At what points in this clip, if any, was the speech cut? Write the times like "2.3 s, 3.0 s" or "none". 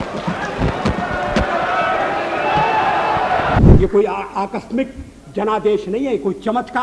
3.6 s